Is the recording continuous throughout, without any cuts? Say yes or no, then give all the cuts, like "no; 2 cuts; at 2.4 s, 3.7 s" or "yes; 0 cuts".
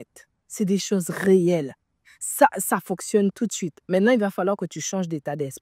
yes; 0 cuts